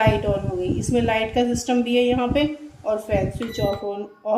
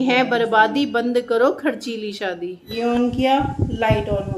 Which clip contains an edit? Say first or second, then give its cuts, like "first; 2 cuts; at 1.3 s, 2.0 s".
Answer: second; 1 cut; at 2.6 s